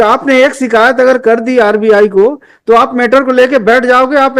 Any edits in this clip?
no; 0 cuts

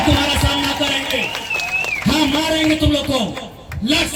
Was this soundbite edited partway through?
no; 0 cuts

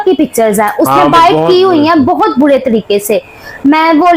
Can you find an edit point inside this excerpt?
no; 0 cuts

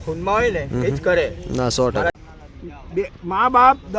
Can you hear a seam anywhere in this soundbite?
yes; 1 cut; at 2.3 s

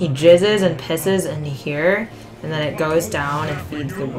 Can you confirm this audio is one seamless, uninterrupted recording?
yes; 0 cuts

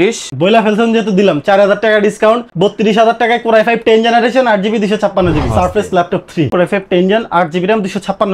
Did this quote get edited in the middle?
yes; 2 cuts; at 5.5 s, 6.5 s

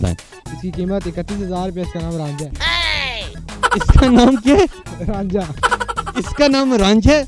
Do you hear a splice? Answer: no; 0 cuts

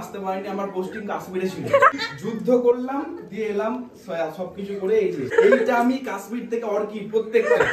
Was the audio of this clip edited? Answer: yes; 2 cuts; at 1.9 s, 5.3 s

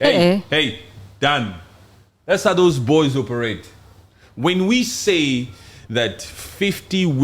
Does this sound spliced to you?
no; 0 cuts

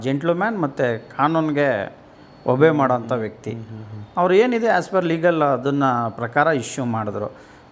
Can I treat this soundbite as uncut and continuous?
yes; 0 cuts

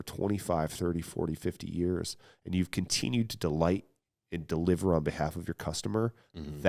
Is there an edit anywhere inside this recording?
no; 0 cuts

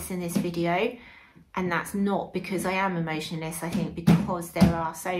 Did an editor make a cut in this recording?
no; 0 cuts

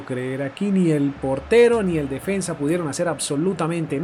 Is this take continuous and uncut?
yes; 0 cuts

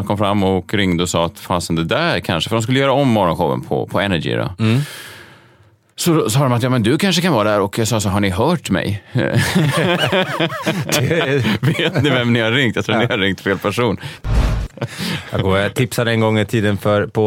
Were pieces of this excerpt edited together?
yes; 1 cut; at 14.6 s

